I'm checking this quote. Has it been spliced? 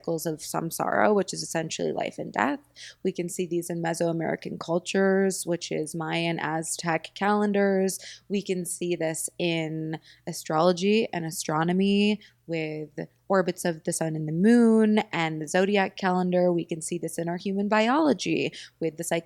no; 0 cuts

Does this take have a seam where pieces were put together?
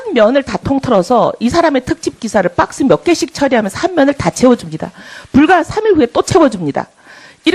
yes; 1 cut; at 3.0 s

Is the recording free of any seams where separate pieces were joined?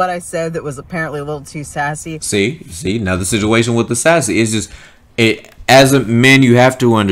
yes; 0 cuts

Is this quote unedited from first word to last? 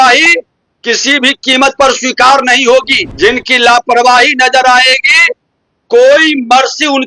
no; 1 cut; at 3.0 s

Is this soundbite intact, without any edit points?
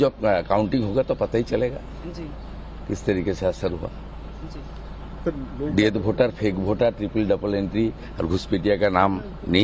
no; 1 cut; at 8.4 s

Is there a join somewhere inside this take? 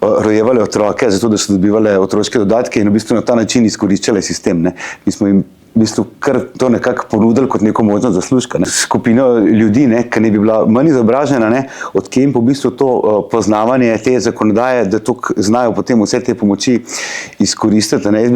yes; 1 cut; at 8.7 s

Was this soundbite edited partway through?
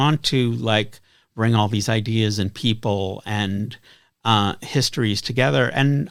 no; 0 cuts

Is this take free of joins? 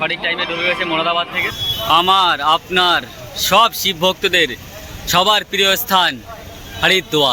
no; 1 cut; at 1.6 s

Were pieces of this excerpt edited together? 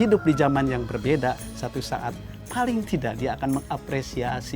yes; 1 cut; at 2.3 s

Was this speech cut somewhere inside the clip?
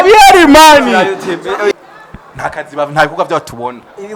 yes; 1 cut; at 1.7 s

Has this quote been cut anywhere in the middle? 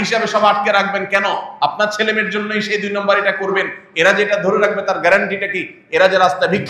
no; 0 cuts

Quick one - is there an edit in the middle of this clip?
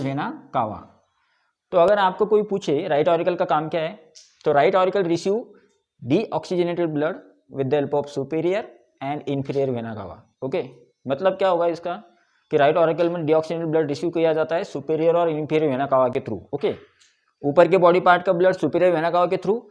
no; 0 cuts

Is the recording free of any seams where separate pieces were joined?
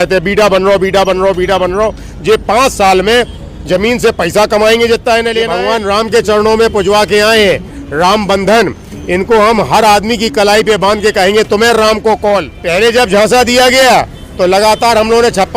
no; 2 cuts; at 5.5 s, 12.6 s

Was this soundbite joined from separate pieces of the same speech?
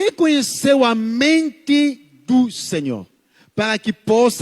no; 0 cuts

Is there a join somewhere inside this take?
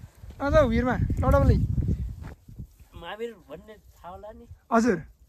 yes; 1 cut; at 2.3 s

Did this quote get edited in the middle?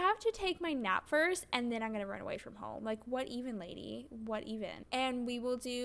yes; 1 cut; at 4.8 s

